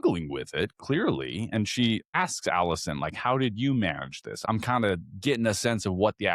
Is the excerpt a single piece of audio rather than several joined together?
no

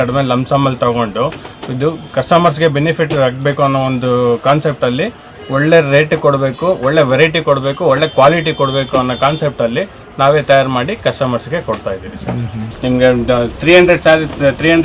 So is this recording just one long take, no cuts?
no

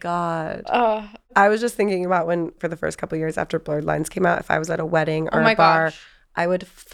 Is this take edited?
yes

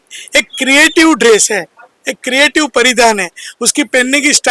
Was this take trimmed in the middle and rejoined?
no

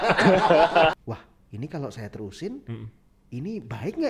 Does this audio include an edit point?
yes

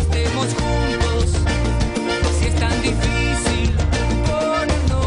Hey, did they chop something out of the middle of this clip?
no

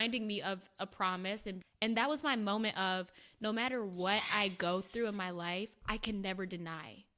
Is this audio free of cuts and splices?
no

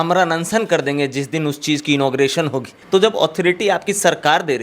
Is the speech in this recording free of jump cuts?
no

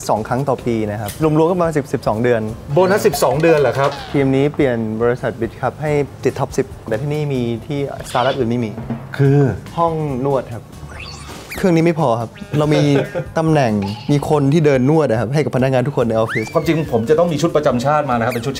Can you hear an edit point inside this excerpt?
yes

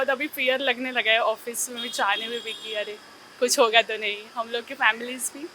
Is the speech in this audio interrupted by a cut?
no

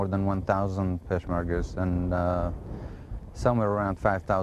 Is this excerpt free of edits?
yes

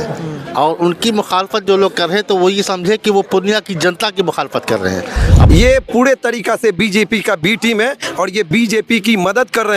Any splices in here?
yes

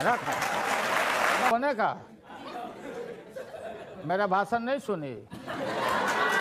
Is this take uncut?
no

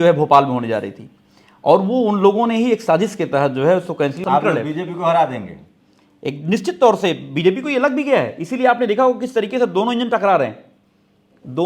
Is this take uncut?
no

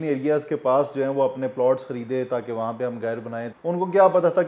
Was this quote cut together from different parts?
yes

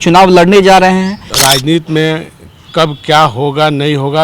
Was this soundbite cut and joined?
yes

